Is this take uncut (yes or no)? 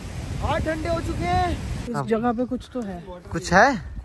no